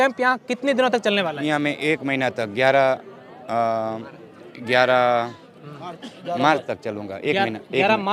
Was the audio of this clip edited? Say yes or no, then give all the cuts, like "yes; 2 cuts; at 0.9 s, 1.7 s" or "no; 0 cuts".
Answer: no; 0 cuts